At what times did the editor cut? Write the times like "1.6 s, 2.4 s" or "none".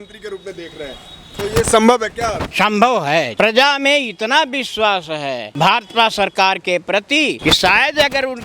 2.4 s, 3.3 s, 5.5 s, 7.4 s